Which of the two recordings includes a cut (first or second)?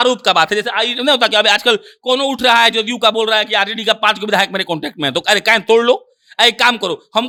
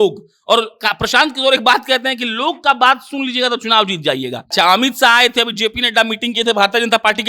second